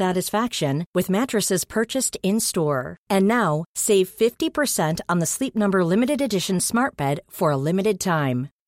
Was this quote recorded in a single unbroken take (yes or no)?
yes